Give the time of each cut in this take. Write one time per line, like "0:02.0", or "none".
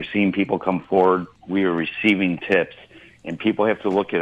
0:01.4